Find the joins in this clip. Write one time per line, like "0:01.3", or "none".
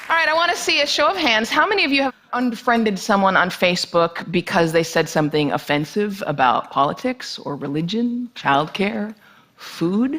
0:05.1